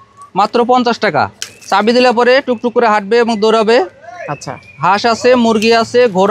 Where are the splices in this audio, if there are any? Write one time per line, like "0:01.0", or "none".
0:01.4